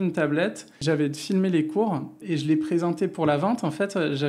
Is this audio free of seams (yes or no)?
no